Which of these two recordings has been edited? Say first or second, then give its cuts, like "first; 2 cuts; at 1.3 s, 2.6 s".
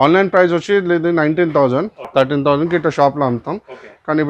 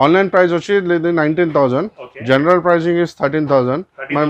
first; 1 cut; at 2.0 s